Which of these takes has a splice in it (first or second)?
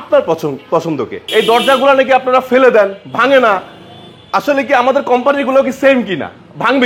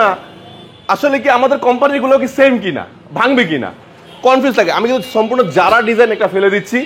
first